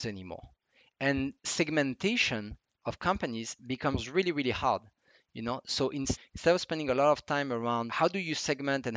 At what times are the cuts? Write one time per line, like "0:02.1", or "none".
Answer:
0:06.2
0:07.9